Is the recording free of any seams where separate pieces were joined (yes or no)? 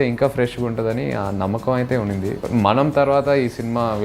no